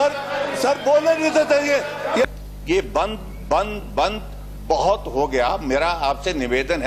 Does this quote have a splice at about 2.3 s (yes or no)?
yes